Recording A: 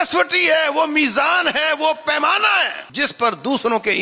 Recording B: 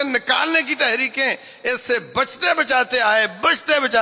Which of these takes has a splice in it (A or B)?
A